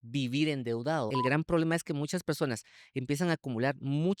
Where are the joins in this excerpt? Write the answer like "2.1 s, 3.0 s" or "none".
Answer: 1.1 s